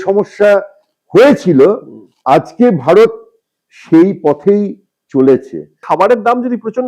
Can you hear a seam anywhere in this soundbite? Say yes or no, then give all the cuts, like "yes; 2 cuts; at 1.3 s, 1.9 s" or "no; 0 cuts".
yes; 1 cut; at 5.8 s